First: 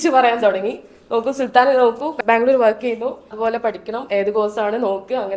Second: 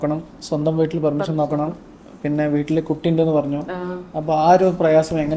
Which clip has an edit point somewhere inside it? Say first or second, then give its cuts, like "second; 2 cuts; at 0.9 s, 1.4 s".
first; 2 cuts; at 2.2 s, 3.3 s